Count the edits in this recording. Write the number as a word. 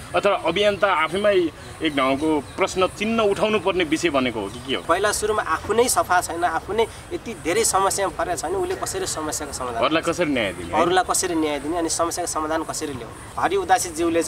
two